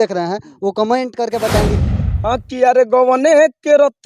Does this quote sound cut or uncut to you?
cut